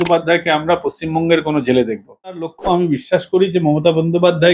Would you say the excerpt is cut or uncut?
cut